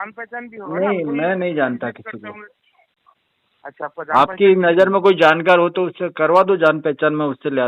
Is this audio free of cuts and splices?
yes; 0 cuts

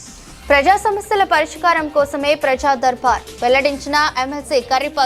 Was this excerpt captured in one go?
yes; 0 cuts

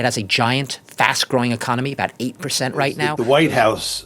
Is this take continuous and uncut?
no; 1 cut; at 3.1 s

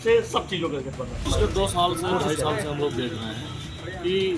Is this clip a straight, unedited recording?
no; 1 cut; at 1.2 s

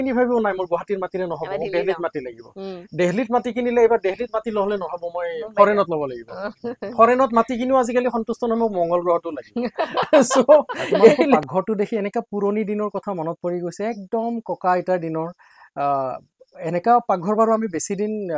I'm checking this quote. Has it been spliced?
yes; 1 cut; at 11.4 s

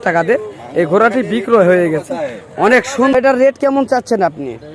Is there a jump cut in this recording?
yes; 1 cut; at 3.1 s

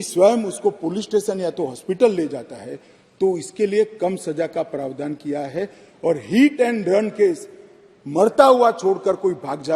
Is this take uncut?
yes; 0 cuts

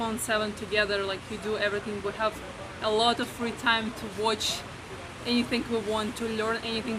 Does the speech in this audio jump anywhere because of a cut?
no; 0 cuts

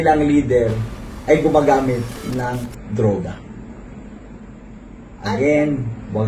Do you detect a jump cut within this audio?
yes; 1 cut; at 4.7 s

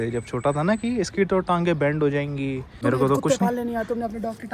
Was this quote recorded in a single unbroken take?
no; 1 cut; at 2.7 s

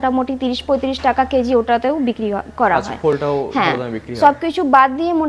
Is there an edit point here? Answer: no; 0 cuts

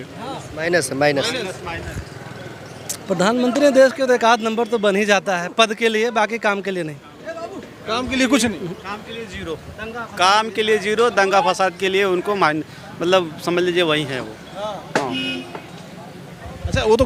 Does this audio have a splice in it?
no; 0 cuts

